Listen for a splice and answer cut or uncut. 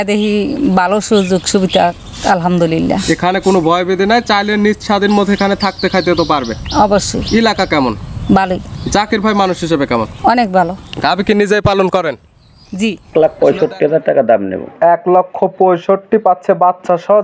cut